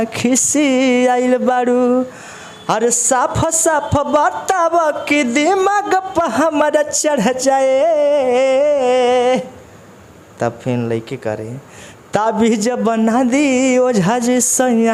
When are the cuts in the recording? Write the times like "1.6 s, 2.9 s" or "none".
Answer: none